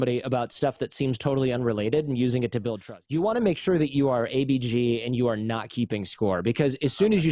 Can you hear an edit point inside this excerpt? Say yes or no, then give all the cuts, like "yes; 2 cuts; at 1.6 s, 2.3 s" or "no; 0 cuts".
yes; 1 cut; at 2.9 s